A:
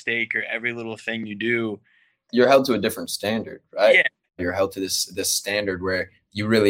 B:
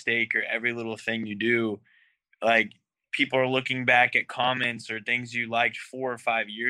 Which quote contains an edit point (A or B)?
A